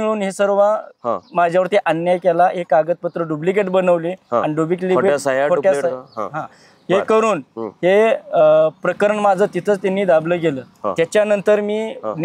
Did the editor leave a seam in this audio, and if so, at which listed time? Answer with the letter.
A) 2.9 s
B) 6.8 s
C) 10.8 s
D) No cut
D